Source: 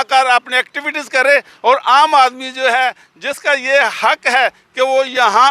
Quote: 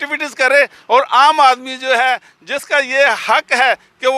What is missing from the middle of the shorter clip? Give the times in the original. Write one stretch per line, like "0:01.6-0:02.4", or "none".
none